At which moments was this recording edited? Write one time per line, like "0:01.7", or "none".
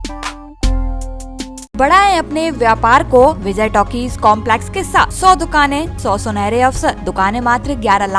0:01.8
0:03.4
0:05.1
0:05.9
0:07.0